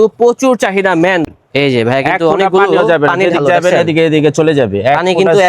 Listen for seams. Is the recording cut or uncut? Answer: cut